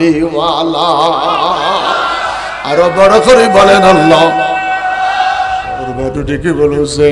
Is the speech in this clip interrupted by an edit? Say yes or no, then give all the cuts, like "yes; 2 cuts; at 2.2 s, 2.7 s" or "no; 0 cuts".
yes; 1 cut; at 5.7 s